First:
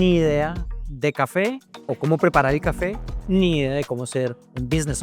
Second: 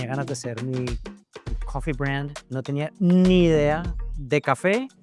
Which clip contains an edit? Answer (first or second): second